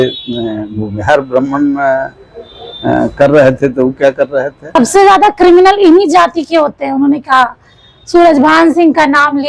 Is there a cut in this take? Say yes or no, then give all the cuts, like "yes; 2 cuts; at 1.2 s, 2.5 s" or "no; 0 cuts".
yes; 1 cut; at 4.6 s